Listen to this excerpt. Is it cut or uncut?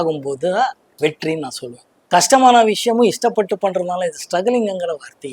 cut